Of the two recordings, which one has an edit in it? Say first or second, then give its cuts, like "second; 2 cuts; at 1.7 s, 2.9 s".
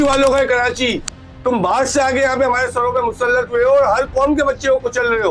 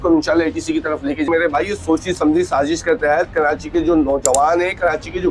second; 1 cut; at 1.3 s